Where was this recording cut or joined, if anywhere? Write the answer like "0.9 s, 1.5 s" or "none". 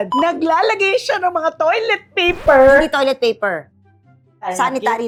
none